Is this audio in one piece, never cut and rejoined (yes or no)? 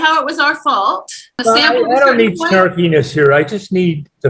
no